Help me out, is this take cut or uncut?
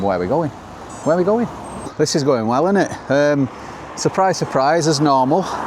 cut